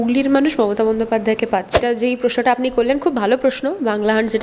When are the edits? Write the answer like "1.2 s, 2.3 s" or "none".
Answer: 1.8 s